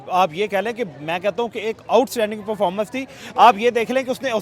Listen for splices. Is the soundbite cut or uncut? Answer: uncut